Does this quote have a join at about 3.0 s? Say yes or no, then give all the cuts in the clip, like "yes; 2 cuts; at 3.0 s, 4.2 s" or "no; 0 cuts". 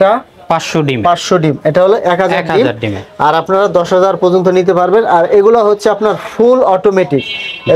no; 0 cuts